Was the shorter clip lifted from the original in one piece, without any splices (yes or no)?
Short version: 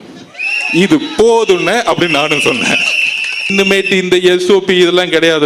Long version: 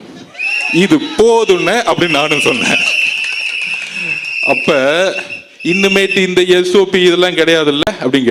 no